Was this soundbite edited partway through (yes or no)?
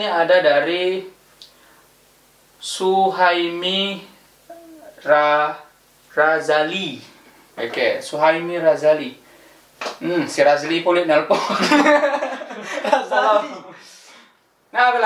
no